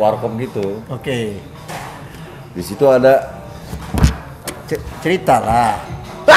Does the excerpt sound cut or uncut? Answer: uncut